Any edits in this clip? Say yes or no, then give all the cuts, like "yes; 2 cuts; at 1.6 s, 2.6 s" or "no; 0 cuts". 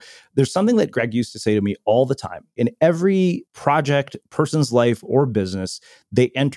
yes; 2 cuts; at 2.5 s, 3.5 s